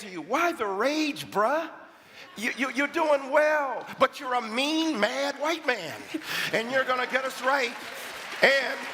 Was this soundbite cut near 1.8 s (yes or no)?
no